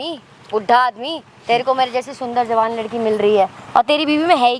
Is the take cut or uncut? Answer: uncut